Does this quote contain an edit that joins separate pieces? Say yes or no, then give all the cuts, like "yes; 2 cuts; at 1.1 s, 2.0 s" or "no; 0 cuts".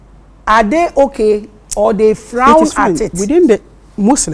yes; 1 cut; at 2.6 s